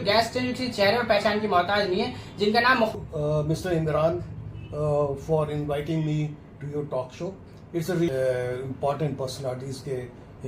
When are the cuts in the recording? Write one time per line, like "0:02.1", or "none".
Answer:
0:03.0
0:08.1